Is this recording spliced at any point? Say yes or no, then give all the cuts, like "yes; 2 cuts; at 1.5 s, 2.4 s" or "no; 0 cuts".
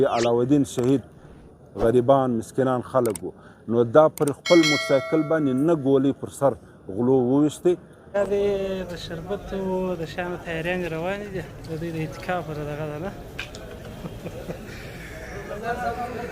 yes; 2 cuts; at 1.3 s, 8.0 s